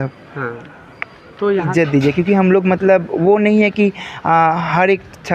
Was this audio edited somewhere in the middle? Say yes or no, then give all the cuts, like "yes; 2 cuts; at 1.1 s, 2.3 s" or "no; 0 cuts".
yes; 1 cut; at 1.7 s